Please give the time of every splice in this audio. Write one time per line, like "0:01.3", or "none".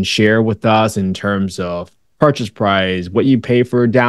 none